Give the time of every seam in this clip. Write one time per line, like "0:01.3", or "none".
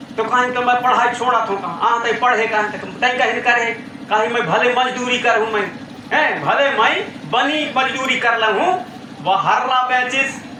none